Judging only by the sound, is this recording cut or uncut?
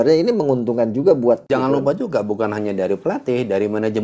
cut